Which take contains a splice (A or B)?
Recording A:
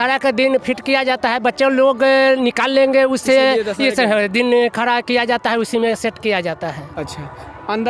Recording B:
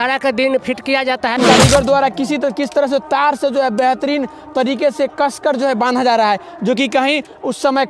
B